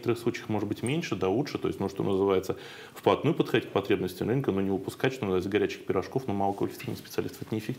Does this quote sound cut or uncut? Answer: uncut